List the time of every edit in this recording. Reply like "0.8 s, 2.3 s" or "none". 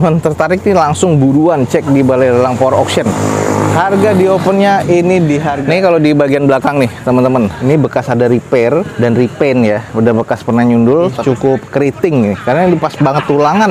5.5 s, 7.6 s, 11.2 s